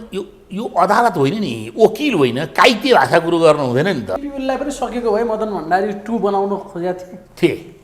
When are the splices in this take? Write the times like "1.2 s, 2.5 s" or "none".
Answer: 4.2 s